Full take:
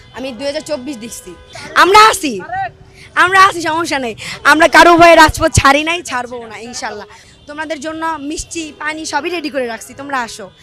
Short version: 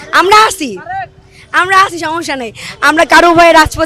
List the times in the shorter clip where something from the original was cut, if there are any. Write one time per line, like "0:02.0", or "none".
none